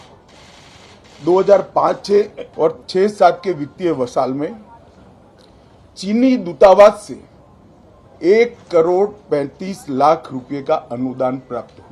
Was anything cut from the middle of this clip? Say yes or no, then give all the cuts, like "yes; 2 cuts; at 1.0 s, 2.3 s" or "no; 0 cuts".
yes; 1 cut; at 2.7 s